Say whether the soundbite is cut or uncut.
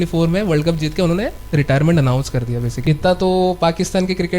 cut